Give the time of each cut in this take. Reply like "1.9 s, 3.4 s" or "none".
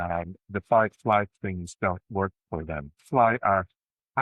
3.0 s